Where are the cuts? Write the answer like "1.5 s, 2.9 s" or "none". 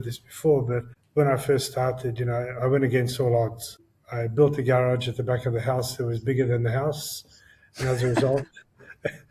0.9 s